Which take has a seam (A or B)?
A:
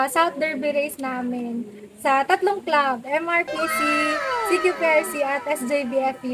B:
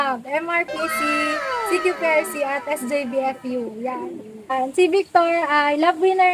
B